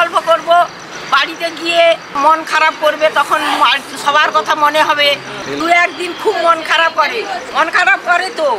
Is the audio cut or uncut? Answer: cut